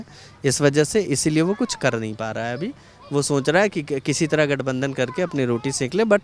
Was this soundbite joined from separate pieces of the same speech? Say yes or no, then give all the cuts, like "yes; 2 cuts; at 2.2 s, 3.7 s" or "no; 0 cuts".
no; 0 cuts